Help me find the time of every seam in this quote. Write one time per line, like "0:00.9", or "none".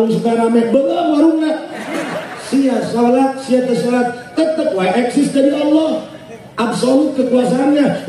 0:02.2